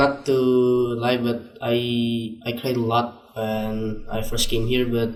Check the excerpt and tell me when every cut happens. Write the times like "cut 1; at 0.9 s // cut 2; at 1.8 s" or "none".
none